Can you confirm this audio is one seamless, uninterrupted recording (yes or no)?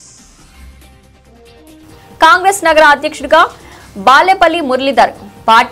yes